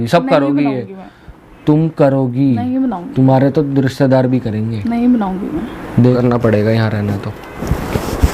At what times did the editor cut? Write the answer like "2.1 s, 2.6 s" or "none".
6.0 s